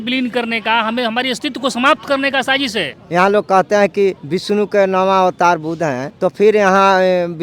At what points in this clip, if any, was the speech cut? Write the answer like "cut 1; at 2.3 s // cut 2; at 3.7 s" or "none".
cut 1; at 2.9 s // cut 2; at 4.3 s // cut 3; at 6.1 s